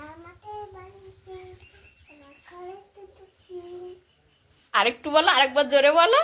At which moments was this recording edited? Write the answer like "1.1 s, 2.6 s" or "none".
none